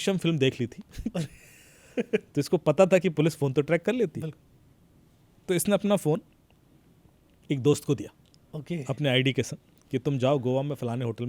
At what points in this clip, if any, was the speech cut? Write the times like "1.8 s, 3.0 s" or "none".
none